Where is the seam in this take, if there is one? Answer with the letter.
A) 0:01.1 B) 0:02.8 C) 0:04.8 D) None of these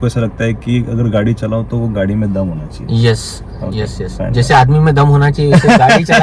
D